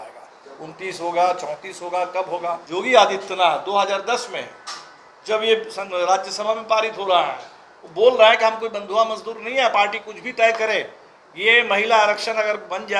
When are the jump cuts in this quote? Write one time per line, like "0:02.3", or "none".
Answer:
0:02.6